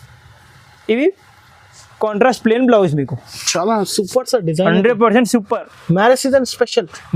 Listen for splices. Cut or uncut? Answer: uncut